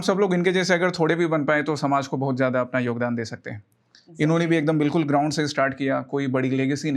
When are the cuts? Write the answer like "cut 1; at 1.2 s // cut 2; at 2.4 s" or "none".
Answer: none